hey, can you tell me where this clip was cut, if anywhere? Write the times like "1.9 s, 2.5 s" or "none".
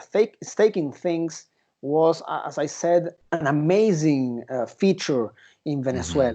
3.2 s